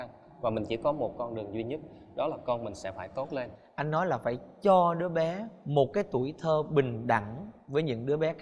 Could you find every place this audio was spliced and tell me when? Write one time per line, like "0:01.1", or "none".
none